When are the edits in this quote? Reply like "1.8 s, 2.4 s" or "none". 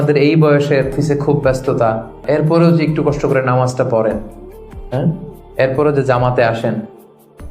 0.9 s, 2.2 s